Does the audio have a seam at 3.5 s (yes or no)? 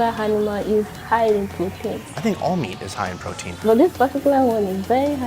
yes